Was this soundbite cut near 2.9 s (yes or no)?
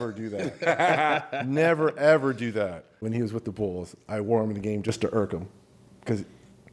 yes